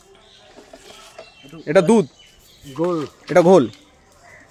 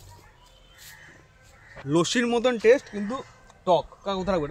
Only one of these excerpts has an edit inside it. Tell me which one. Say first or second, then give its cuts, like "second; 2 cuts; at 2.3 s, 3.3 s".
second; 1 cut; at 1.8 s